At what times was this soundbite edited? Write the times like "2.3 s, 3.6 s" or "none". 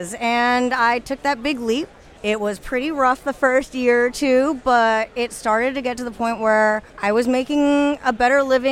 2.0 s, 6.9 s

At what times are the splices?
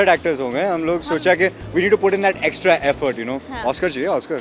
none

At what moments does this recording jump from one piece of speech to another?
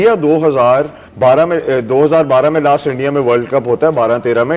1.0 s

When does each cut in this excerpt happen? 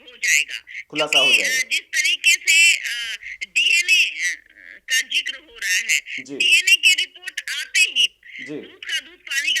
none

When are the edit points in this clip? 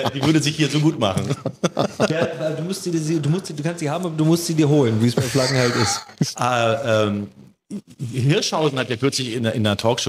6.3 s

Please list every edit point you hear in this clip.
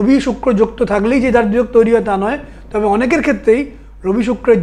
none

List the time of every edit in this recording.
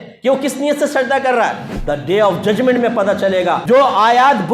1.7 s, 3.6 s

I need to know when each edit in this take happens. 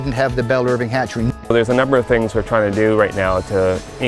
1.3 s

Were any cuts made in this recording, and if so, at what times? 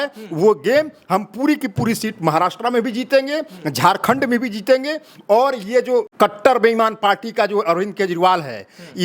6.1 s

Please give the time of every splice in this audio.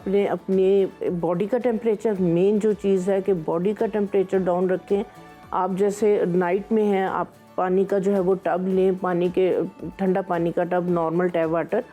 none

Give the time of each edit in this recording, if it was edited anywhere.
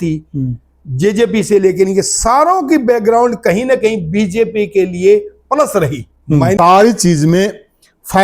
6.6 s

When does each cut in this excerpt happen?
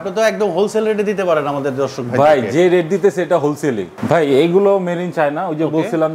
3.9 s

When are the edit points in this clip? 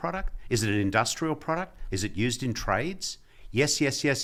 none

